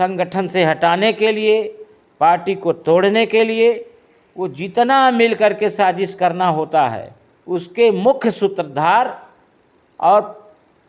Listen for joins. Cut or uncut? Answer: uncut